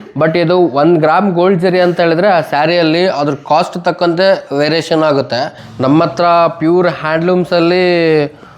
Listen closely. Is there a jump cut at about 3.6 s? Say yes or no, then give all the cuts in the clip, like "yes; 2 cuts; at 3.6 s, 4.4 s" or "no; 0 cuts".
no; 1 cut; at 5.6 s